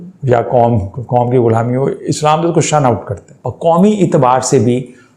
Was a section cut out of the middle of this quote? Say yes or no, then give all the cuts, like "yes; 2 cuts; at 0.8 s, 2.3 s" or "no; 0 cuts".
yes; 1 cut; at 3.4 s